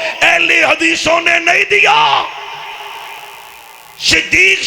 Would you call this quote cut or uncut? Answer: uncut